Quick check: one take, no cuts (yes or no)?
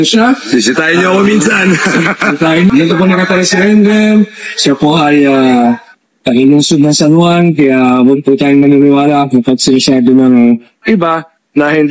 no